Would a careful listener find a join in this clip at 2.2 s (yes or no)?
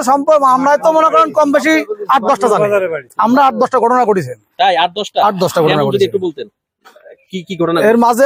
no